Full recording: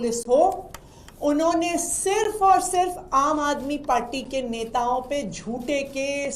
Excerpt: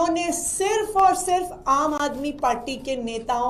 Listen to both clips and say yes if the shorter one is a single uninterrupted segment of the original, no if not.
yes